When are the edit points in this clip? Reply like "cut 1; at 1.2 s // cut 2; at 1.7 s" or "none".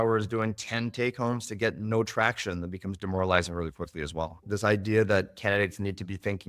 cut 1; at 4.5 s